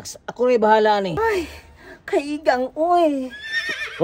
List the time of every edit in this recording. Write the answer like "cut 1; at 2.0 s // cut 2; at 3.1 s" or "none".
cut 1; at 1.1 s

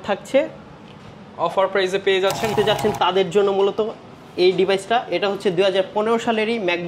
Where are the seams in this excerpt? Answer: cut 1; at 2.5 s

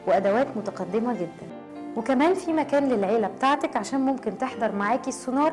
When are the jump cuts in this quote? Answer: none

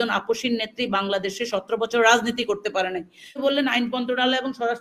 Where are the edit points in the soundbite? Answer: cut 1; at 3.4 s

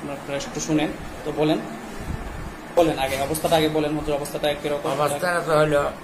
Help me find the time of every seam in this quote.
cut 1; at 2.8 s

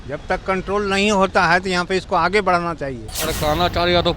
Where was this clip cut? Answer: cut 1; at 3.1 s

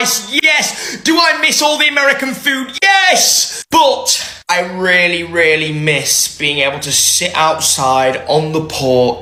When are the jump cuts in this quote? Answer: none

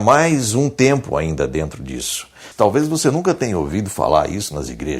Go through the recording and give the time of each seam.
cut 1; at 2.5 s

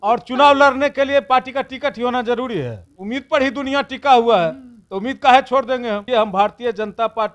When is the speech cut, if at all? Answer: cut 1; at 2.9 s // cut 2; at 6.0 s

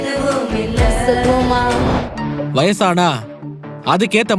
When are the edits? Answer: cut 1; at 2.0 s

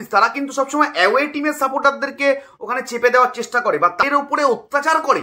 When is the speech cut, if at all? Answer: cut 1; at 4.0 s

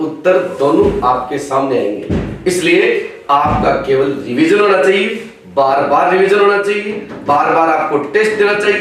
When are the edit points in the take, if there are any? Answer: none

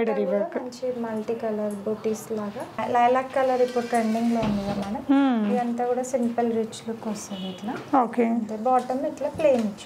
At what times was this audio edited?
cut 1; at 2.8 s

